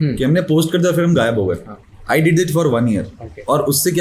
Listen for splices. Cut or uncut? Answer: uncut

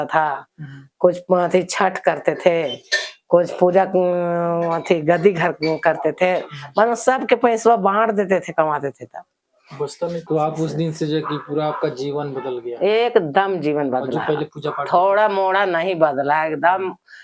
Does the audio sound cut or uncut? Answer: cut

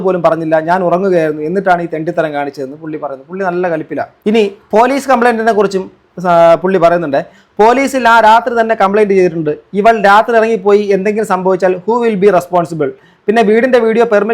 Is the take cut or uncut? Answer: cut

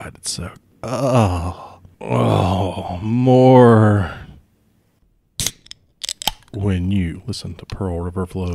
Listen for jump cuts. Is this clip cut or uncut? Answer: cut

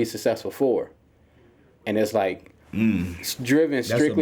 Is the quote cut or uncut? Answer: uncut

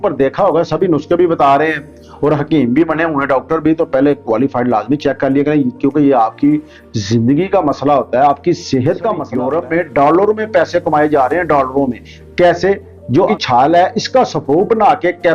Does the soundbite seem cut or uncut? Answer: cut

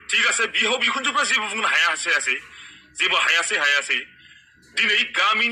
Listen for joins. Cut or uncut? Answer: uncut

